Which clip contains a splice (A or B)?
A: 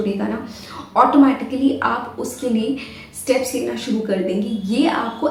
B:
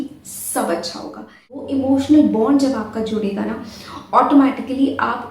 B